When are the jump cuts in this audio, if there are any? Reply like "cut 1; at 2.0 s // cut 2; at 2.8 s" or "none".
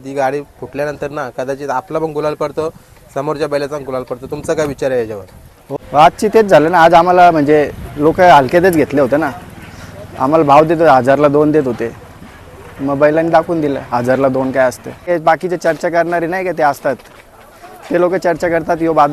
cut 1; at 5.6 s // cut 2; at 15.1 s

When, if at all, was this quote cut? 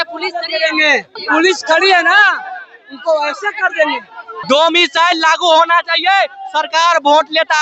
cut 1; at 1.2 s // cut 2; at 4.4 s

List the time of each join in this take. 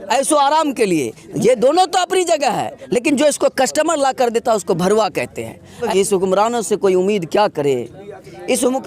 cut 1; at 5.8 s

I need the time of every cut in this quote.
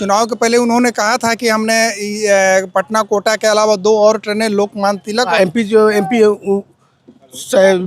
cut 1; at 5.3 s

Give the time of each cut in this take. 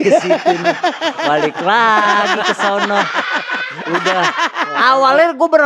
none

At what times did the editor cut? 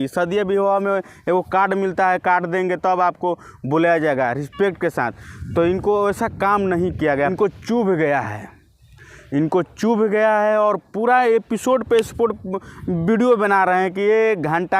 cut 1; at 7.3 s

